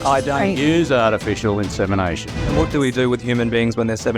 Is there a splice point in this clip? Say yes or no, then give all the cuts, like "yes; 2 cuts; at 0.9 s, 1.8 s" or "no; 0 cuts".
yes; 1 cut; at 2.6 s